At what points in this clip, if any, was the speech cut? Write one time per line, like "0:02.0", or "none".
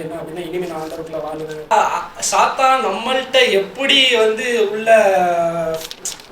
0:01.7